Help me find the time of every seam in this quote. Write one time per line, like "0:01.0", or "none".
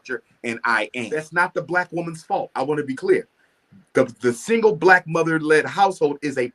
0:00.9